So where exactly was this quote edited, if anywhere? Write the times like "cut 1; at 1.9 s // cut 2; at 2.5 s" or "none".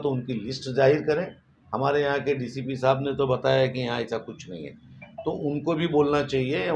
none